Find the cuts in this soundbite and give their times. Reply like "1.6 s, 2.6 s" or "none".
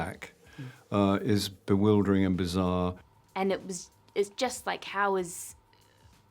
3.0 s